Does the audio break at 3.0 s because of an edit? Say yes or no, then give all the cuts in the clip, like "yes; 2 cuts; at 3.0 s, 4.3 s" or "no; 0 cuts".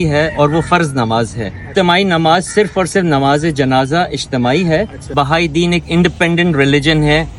no; 2 cuts; at 1.7 s, 5.0 s